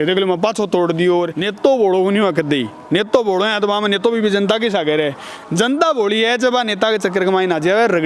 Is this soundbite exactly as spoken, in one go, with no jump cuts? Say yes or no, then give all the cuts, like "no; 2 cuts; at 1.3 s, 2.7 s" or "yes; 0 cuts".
no; 1 cut; at 1.4 s